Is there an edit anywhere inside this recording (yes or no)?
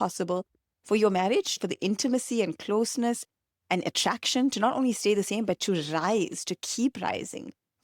yes